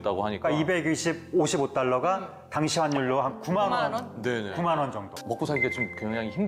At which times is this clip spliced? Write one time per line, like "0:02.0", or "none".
0:05.1

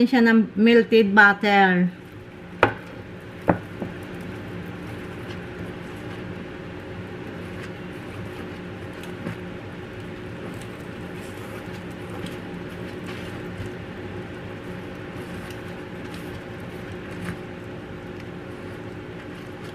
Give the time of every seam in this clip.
0:04.9

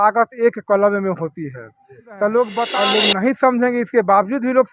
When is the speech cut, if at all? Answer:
0:02.8

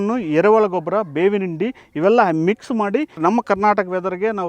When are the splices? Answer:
0:03.2

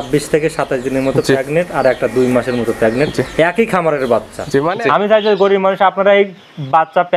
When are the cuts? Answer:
0:04.7

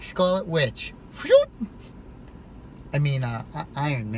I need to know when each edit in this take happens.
none

